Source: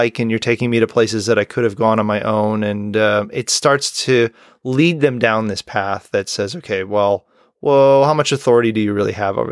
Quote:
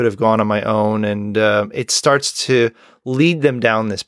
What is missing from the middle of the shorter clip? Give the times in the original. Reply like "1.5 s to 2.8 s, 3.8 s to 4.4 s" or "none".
none